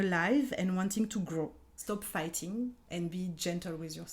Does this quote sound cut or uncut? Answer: cut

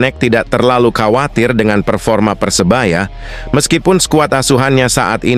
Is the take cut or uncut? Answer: uncut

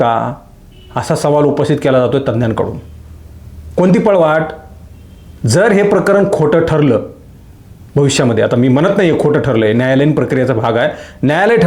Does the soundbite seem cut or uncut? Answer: uncut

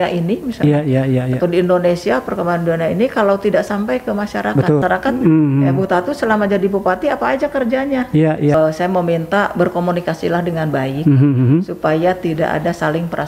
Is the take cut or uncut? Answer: cut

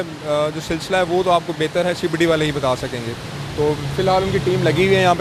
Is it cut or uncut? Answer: uncut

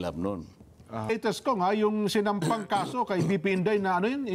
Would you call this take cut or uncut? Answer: cut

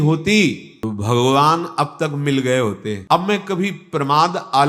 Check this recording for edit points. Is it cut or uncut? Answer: cut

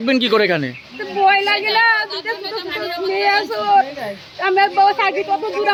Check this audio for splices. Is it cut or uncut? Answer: uncut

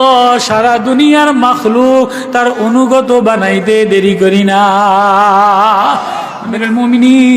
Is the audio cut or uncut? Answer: cut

